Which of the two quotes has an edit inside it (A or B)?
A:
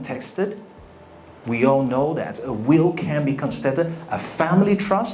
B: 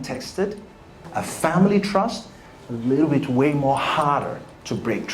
B